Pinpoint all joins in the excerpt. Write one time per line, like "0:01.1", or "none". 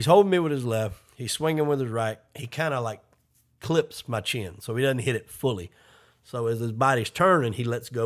none